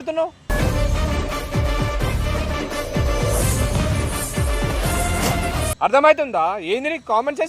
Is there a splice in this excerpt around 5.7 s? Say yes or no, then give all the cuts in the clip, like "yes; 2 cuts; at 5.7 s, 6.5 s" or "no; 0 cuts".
yes; 1 cut; at 5.7 s